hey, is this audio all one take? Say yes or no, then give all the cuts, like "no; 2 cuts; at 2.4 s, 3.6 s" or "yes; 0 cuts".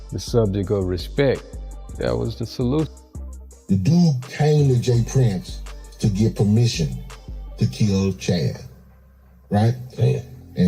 no; 1 cut; at 3.2 s